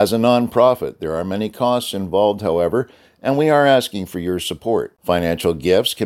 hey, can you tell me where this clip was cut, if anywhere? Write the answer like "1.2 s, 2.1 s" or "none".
none